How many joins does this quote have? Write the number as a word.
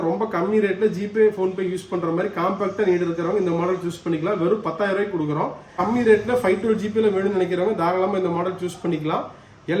one